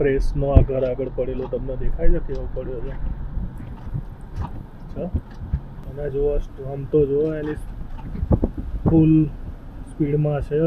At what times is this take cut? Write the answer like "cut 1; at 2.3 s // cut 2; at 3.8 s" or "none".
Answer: none